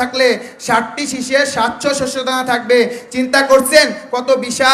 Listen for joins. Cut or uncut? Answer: uncut